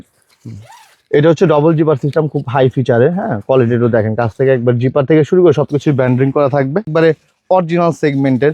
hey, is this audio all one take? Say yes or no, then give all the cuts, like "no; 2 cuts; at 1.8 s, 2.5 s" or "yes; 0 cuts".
no; 1 cut; at 6.9 s